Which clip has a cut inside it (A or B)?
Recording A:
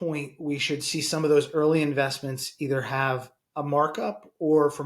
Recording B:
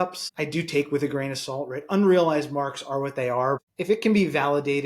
B